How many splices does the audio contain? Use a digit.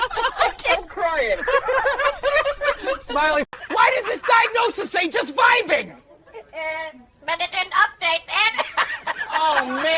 1